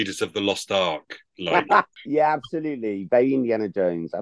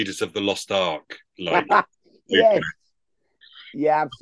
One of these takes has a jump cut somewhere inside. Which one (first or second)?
first